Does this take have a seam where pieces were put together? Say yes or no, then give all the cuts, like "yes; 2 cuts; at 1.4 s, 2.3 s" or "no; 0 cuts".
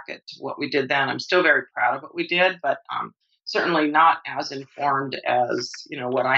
no; 0 cuts